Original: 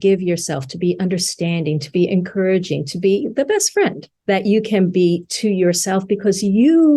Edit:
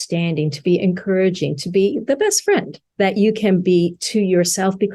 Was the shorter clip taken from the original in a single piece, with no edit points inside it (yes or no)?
yes